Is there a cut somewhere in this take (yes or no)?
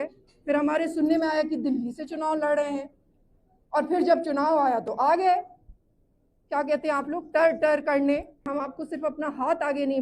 yes